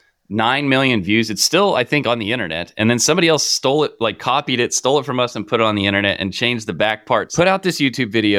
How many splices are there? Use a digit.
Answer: 1